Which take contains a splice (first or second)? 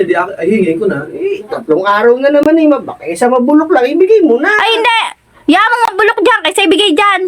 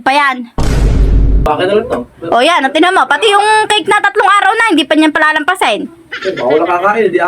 second